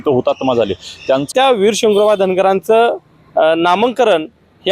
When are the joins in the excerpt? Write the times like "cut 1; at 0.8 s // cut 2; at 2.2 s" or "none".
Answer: cut 1; at 1.3 s

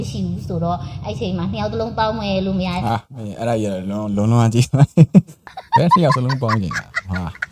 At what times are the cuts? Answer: none

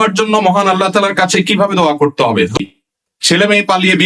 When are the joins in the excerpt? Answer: cut 1; at 2.5 s

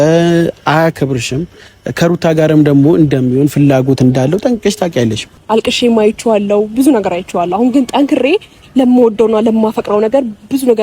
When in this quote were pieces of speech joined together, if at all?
cut 1; at 5.3 s

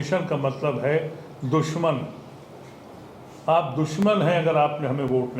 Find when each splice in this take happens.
none

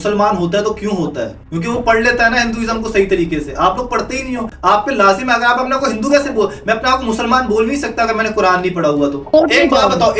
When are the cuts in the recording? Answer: cut 1; at 9.3 s

